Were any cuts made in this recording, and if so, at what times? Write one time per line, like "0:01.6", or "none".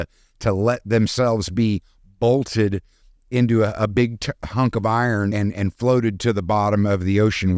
0:05.3